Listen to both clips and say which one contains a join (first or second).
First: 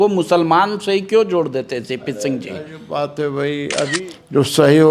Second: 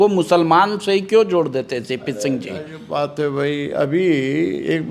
first